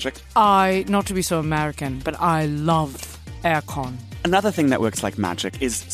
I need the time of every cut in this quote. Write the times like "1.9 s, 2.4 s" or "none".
4.1 s